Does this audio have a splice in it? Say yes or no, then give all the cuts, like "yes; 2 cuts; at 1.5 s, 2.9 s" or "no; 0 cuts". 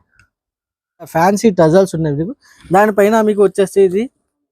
yes; 1 cut; at 1.1 s